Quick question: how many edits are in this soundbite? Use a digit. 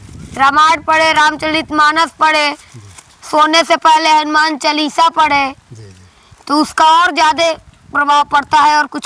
0